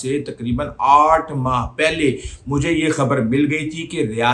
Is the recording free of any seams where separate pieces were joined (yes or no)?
yes